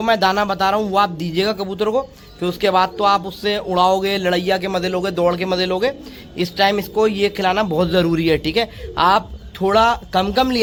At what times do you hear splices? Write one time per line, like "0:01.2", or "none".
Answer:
none